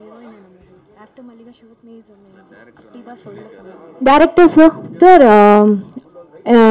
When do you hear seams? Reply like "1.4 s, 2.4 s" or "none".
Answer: 3.8 s, 4.9 s

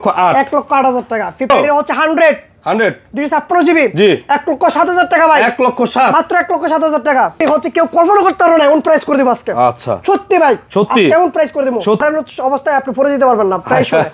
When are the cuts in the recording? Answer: 1.5 s, 7.3 s, 12.0 s

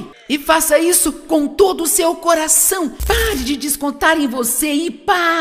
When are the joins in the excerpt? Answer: 3.0 s

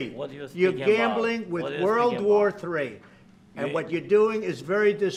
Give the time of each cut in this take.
none

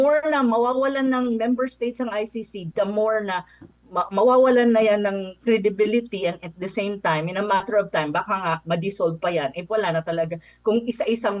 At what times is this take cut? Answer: none

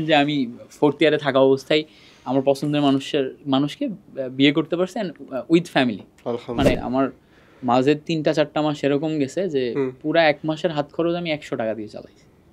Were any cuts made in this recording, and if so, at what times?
6.8 s

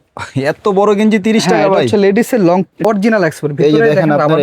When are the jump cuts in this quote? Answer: 2.8 s

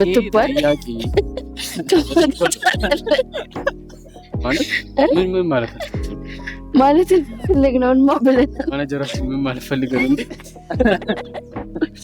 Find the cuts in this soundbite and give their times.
none

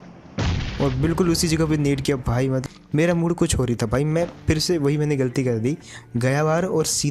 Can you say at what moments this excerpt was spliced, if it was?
2.6 s

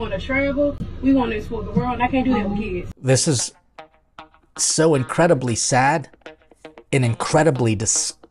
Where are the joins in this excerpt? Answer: 2.9 s

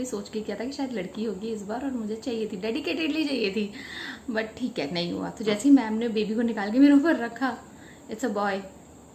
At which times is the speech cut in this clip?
none

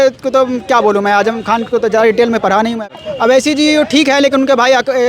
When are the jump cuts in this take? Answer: 3.0 s

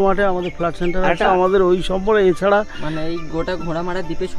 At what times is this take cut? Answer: 1.3 s

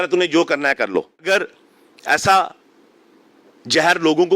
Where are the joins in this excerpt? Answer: 1.2 s

